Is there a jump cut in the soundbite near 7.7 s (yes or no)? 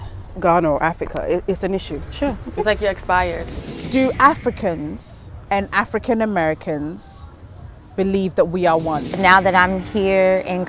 no